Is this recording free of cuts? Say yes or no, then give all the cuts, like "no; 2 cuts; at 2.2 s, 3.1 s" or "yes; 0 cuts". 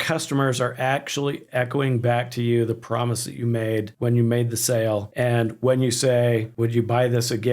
no; 3 cuts; at 3.9 s, 5.1 s, 6.5 s